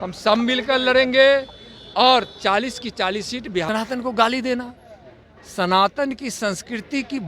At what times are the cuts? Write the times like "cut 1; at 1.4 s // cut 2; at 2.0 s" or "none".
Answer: cut 1; at 3.7 s

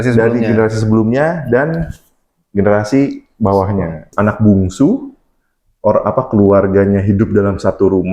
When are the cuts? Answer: cut 1; at 4.1 s

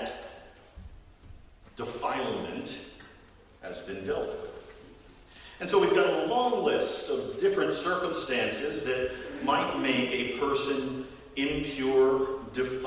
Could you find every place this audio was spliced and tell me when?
none

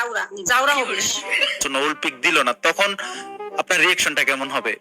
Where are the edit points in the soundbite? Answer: cut 1; at 1.6 s

